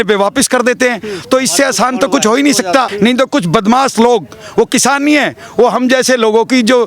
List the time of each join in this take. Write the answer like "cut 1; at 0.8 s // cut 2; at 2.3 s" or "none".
cut 1; at 2.9 s